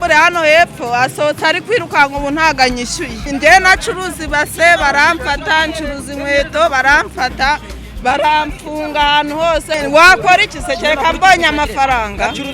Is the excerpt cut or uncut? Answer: cut